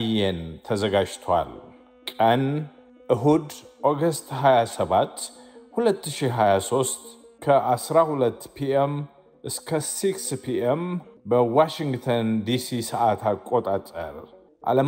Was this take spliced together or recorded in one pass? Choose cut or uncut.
uncut